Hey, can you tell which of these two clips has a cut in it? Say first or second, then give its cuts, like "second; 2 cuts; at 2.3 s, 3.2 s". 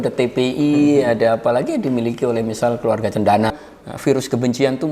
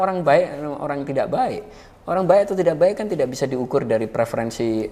first; 1 cut; at 3.6 s